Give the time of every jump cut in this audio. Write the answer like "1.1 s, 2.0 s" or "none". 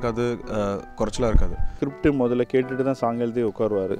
1.6 s